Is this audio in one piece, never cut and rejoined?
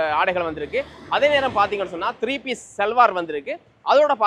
yes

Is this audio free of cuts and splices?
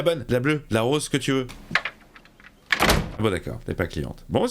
no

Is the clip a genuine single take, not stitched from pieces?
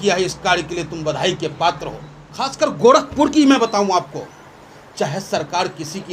no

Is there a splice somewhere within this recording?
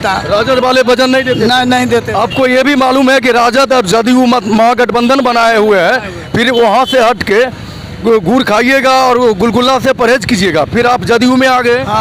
no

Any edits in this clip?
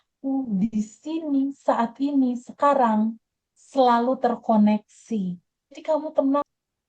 yes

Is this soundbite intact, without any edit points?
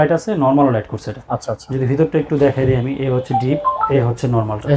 no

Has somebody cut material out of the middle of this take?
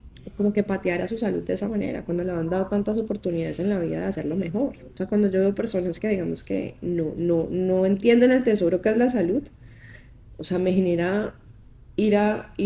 yes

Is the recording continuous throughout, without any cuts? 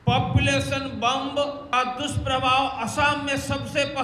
no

